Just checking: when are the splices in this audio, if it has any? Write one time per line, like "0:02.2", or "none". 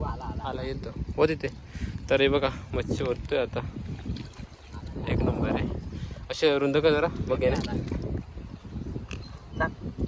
none